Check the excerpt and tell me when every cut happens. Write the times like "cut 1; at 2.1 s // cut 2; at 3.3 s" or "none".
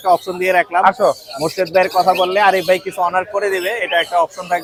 none